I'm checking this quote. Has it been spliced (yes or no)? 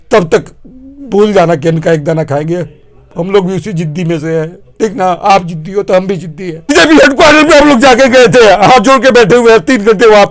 yes